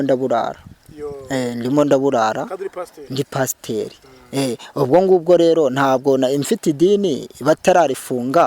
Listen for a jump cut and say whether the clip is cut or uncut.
uncut